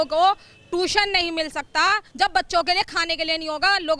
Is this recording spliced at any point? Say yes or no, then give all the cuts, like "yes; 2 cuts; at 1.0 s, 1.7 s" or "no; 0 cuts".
yes; 1 cut; at 2.1 s